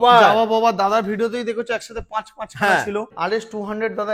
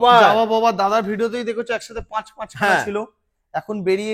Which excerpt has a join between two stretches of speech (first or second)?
first